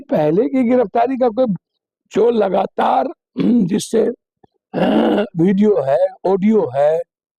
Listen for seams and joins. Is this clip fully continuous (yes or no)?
yes